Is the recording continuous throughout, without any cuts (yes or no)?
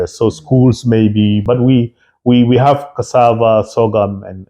no